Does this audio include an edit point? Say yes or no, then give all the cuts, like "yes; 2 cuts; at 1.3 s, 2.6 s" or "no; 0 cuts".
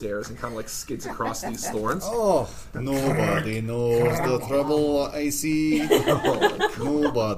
yes; 1 cut; at 2.7 s